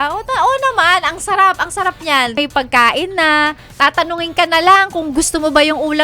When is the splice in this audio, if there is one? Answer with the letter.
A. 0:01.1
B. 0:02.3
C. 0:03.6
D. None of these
B